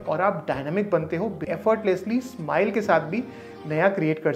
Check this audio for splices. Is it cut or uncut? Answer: cut